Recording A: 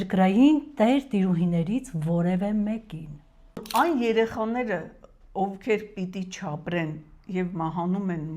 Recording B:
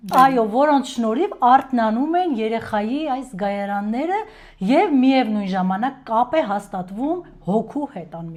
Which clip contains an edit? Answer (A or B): A